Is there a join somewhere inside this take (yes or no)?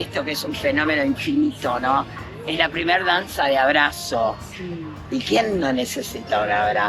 no